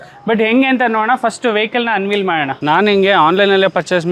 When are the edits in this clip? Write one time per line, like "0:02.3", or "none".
0:02.5